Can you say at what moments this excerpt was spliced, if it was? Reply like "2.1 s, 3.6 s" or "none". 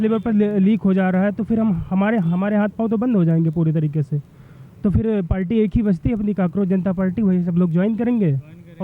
none